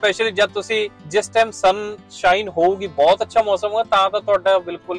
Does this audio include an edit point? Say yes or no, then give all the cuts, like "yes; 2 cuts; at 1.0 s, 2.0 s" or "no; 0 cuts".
yes; 1 cut; at 1.0 s